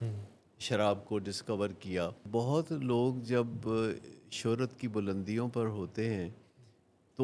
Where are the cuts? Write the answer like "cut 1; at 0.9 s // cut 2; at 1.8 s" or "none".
cut 1; at 2.2 s